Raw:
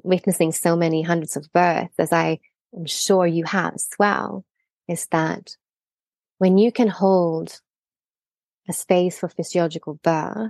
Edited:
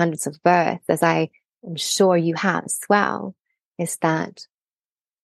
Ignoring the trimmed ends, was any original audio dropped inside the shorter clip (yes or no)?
no